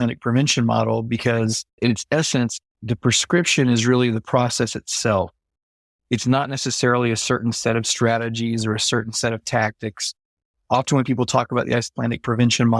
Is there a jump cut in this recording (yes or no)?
yes